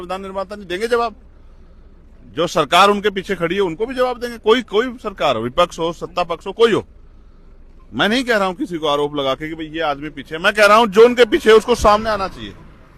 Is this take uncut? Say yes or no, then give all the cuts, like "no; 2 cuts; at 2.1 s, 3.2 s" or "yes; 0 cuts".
yes; 0 cuts